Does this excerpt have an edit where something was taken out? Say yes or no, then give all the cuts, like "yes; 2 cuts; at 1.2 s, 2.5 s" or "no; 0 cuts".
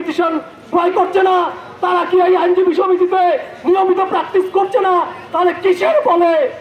no; 0 cuts